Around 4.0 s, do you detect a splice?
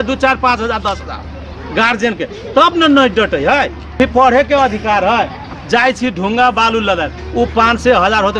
yes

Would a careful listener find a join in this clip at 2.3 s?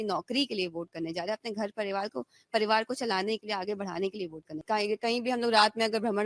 no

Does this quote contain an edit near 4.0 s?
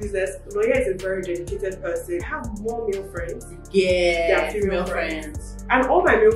no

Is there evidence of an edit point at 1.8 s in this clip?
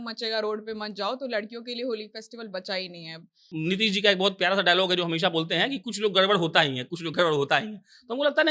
no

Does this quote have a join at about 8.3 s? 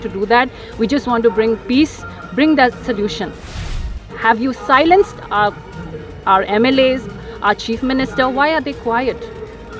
no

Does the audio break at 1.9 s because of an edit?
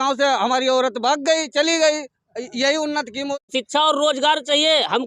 no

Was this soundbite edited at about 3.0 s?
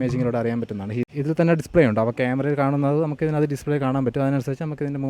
no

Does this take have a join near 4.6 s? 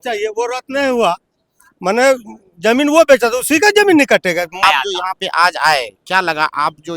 yes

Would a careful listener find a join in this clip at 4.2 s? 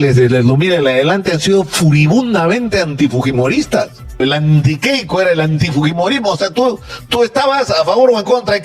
yes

